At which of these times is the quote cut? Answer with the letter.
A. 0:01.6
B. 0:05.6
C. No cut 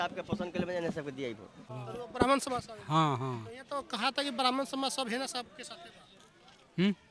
A